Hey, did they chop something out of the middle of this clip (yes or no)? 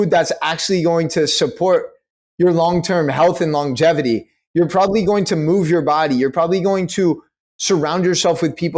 no